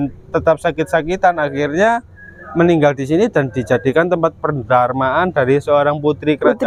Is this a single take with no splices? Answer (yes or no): yes